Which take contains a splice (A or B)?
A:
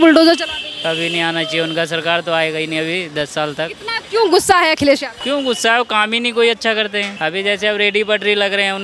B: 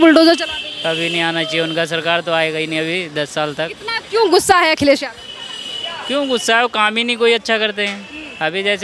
A